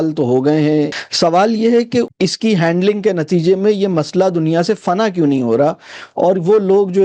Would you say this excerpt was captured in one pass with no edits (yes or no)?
no